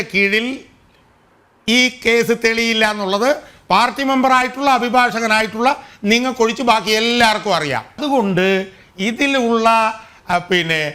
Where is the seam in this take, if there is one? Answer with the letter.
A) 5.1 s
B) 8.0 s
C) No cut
B